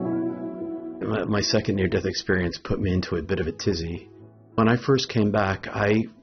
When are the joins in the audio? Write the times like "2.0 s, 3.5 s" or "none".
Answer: 0.9 s, 4.6 s